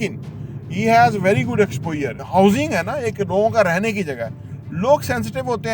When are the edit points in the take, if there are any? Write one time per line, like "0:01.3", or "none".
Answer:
0:02.1

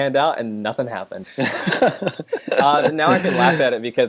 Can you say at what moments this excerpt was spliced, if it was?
0:01.2

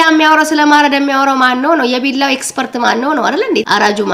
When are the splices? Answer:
none

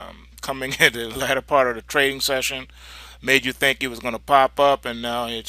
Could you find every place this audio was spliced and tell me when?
0:03.4

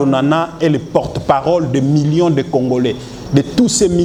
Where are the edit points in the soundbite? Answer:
none

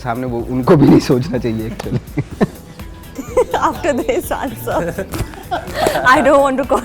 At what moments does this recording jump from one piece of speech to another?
none

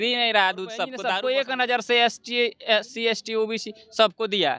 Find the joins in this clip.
0:01.0

